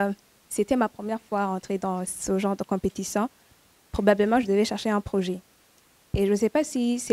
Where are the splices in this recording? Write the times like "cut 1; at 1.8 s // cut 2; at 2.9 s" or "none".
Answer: none